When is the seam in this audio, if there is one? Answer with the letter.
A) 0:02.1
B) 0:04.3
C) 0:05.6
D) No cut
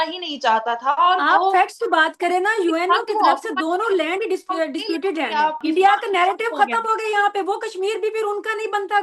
C